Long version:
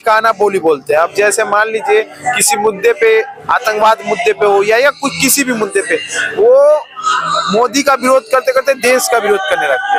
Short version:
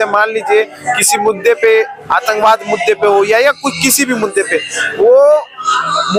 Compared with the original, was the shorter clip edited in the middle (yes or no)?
no